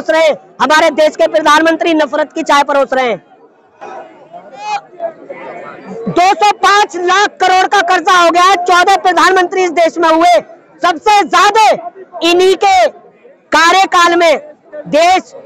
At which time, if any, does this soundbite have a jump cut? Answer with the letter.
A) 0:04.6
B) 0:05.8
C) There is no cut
A